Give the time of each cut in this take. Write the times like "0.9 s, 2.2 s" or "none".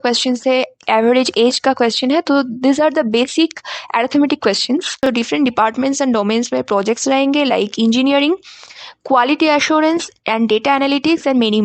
5.0 s